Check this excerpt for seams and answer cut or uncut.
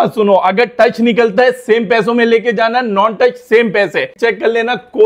cut